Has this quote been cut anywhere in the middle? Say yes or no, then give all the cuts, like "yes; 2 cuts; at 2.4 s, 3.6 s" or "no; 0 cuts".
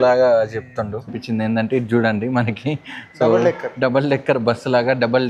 yes; 1 cut; at 1.2 s